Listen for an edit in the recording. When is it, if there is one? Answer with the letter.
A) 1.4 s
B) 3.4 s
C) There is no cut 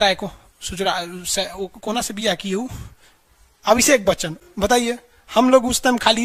C